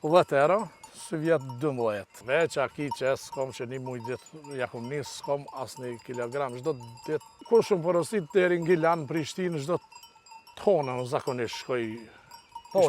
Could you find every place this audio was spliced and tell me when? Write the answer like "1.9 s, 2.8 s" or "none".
2.1 s, 7.3 s